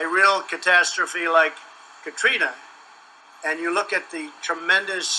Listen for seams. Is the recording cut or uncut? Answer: cut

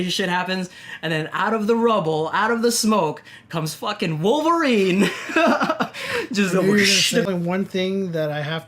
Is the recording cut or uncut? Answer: cut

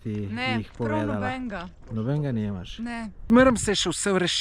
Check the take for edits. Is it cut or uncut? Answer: cut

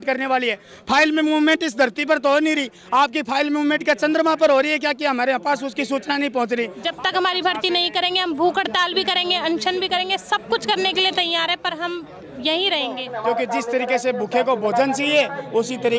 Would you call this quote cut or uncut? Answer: cut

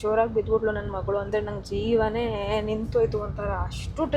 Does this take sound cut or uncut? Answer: uncut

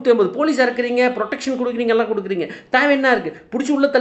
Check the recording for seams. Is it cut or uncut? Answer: uncut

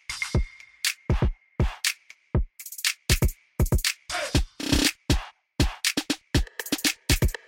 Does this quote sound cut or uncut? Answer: uncut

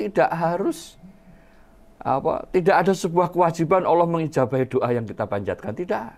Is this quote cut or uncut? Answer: uncut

